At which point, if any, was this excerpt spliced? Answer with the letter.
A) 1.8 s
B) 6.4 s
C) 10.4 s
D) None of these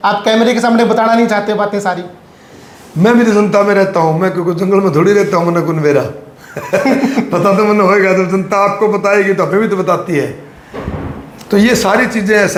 D